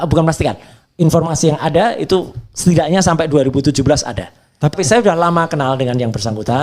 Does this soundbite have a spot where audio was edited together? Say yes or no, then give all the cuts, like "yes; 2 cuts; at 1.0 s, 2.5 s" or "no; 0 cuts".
yes; 1 cut; at 4.7 s